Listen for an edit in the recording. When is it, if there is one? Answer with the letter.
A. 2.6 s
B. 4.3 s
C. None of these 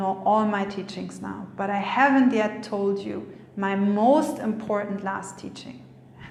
C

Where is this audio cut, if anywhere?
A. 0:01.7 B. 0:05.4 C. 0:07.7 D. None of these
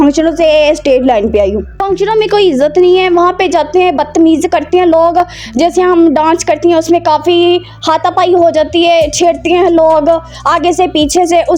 A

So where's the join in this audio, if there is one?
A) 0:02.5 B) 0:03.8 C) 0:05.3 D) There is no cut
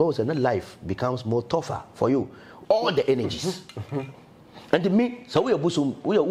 A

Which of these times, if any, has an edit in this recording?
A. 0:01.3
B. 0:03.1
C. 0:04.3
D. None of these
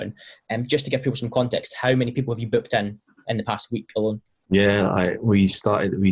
C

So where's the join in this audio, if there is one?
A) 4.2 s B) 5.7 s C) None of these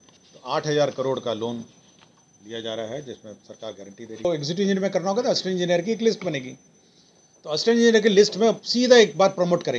A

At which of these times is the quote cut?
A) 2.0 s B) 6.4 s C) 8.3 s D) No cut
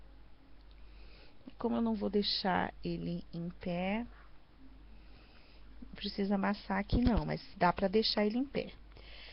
C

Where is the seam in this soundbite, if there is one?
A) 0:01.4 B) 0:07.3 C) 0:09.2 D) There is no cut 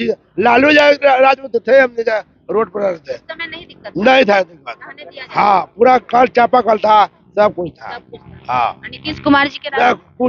D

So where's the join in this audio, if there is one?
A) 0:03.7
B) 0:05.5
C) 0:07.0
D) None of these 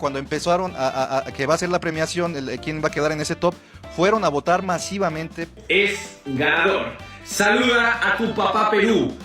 B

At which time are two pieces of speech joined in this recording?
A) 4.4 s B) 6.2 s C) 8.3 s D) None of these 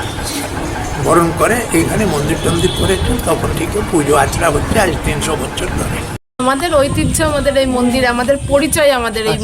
B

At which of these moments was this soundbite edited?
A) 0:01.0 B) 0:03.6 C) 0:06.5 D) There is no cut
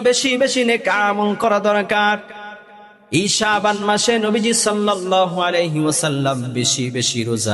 D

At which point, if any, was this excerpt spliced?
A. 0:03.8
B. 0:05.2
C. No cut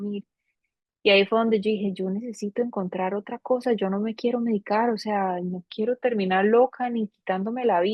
C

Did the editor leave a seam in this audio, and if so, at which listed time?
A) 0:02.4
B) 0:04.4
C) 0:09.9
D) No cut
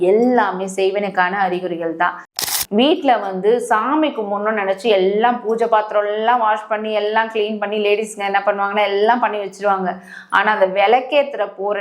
A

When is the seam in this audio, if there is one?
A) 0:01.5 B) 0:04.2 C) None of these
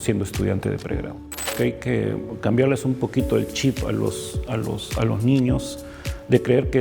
A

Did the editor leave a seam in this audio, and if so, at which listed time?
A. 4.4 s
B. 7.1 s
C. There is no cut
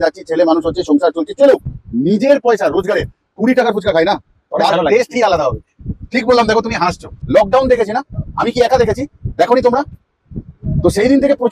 B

